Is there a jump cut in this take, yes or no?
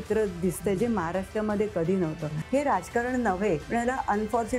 yes